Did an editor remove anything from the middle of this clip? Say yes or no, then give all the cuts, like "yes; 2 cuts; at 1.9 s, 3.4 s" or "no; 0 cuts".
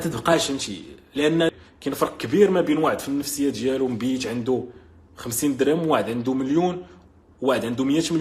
yes; 1 cut; at 1.5 s